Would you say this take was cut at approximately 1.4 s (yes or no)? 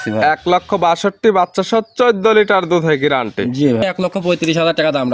no